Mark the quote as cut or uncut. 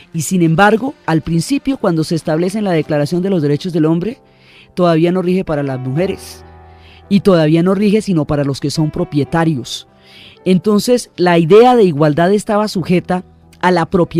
cut